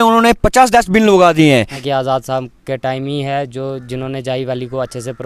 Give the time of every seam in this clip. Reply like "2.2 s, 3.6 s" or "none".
1.8 s

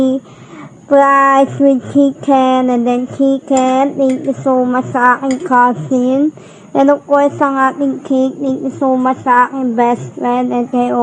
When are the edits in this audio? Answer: none

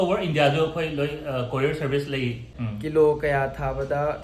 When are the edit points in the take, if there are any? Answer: 2.5 s

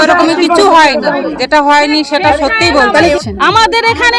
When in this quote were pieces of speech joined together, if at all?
1.4 s, 3.1 s

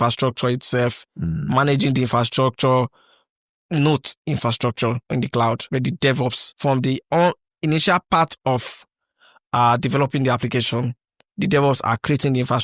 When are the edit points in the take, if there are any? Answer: 5.0 s, 6.2 s

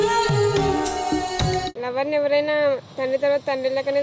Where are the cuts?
1.7 s

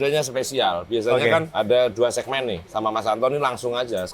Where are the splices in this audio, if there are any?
1.5 s, 2.6 s

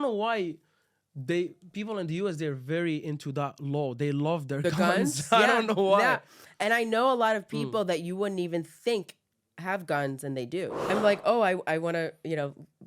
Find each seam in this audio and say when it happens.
10.9 s

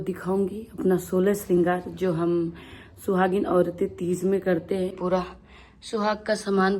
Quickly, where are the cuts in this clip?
5.0 s

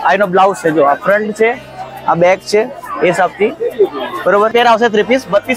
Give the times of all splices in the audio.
4.5 s

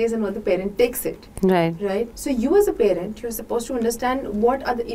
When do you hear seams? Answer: 2.1 s

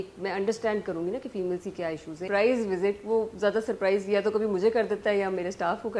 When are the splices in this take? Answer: 2.2 s

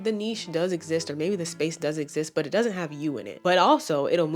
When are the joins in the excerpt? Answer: 3.3 s

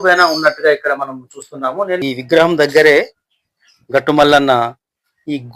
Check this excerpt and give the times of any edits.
2.0 s

